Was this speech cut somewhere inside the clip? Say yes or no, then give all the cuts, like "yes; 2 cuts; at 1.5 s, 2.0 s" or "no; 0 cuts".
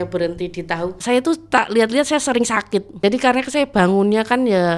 yes; 2 cuts; at 1.0 s, 3.0 s